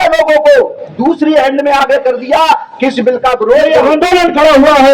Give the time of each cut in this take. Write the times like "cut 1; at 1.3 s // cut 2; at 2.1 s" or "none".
cut 1; at 3.8 s